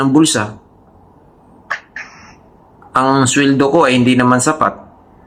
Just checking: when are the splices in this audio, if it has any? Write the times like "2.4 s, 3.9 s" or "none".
none